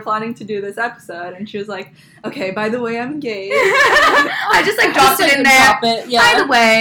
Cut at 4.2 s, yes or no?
no